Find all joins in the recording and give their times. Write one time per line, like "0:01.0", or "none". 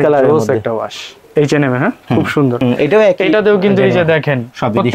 0:01.2
0:02.6